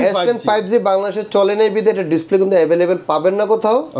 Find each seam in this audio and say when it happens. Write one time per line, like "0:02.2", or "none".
none